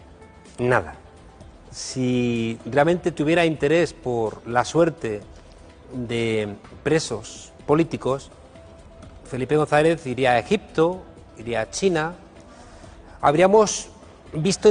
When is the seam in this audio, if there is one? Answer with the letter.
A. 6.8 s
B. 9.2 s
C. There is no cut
C